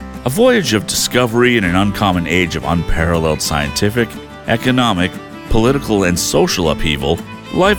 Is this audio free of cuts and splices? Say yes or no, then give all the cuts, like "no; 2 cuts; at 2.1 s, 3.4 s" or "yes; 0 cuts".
yes; 0 cuts